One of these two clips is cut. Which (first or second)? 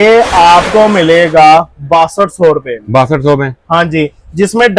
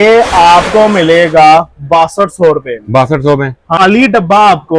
second